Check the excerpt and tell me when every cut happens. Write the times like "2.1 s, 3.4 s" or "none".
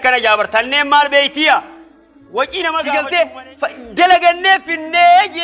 2.8 s